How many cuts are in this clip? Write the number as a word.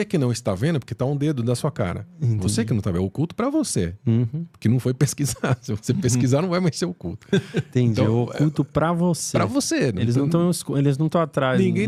zero